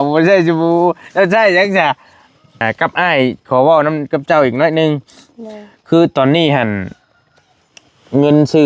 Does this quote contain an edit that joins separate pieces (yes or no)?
yes